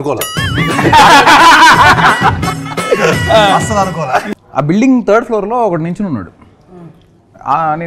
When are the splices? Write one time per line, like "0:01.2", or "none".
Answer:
0:04.3